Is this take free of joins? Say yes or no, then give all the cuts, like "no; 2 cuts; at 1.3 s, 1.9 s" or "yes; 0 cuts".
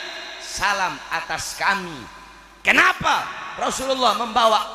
yes; 0 cuts